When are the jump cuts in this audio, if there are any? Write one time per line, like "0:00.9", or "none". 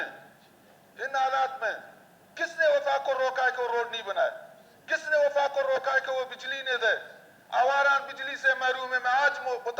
none